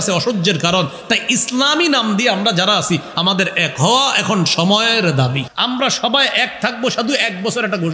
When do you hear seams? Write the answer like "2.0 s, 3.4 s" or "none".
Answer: 5.5 s